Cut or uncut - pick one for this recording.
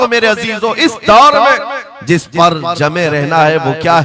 uncut